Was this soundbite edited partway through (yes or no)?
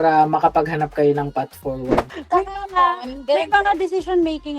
yes